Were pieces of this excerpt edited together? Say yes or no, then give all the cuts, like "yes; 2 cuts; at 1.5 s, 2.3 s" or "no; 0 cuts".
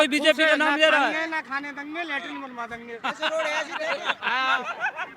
no; 0 cuts